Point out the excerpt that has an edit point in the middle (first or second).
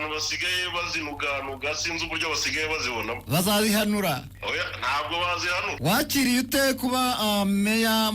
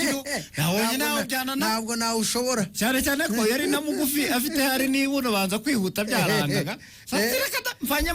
first